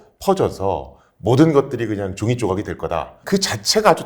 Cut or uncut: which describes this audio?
cut